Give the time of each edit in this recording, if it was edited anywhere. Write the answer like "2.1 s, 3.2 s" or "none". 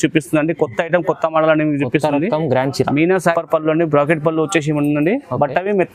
3.3 s